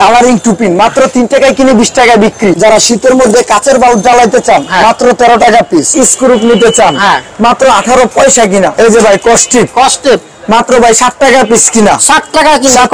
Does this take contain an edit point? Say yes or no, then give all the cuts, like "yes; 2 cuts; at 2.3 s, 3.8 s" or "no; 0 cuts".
yes; 3 cuts; at 2.5 s, 5.9 s, 8.7 s